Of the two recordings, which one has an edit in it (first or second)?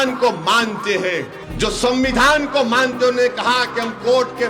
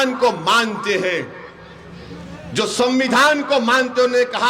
first